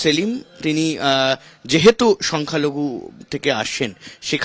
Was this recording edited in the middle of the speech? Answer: no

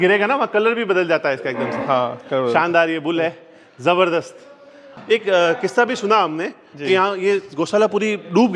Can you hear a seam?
yes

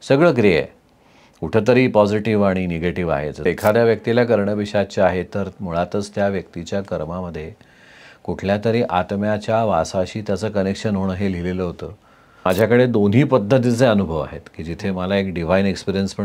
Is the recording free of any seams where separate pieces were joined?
no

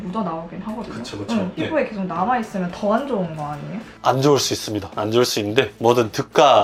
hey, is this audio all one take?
yes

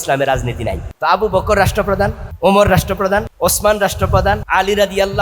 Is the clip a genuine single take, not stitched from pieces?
no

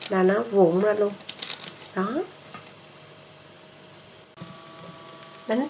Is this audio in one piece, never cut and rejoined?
no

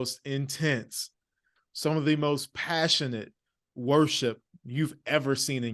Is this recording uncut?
yes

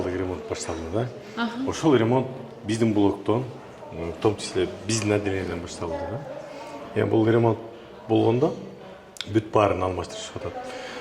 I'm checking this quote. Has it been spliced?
no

